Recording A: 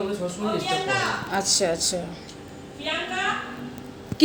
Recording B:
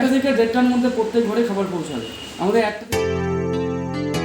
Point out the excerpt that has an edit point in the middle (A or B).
B